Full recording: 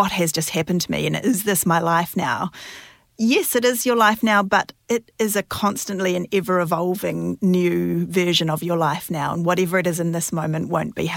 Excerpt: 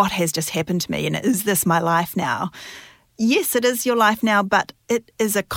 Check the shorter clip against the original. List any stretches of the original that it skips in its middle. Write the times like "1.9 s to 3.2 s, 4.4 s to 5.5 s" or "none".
none